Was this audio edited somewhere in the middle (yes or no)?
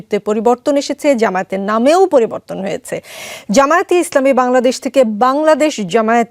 no